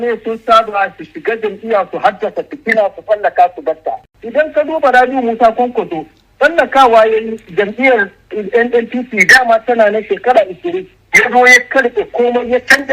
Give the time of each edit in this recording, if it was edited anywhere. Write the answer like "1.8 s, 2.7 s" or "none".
4.2 s